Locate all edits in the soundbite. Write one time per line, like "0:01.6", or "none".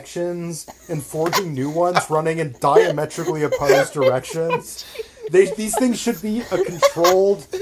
none